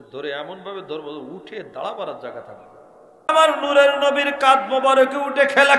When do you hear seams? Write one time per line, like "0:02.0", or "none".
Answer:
0:03.3